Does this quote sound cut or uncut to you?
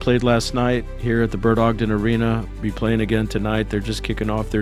uncut